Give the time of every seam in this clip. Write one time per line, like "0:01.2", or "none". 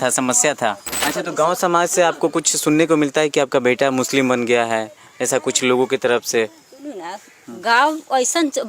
0:00.9